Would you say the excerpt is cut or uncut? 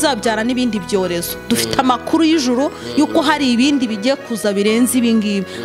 uncut